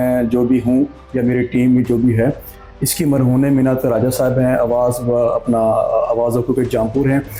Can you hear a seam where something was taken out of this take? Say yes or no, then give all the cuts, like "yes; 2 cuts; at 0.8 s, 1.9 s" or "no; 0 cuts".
no; 0 cuts